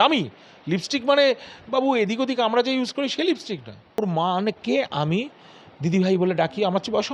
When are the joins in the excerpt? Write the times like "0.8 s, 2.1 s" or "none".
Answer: 4.0 s